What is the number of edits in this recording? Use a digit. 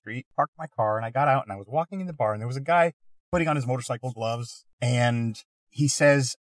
0